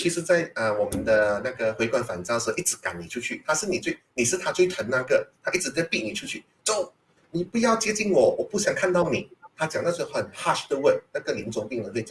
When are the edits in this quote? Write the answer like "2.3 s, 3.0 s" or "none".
none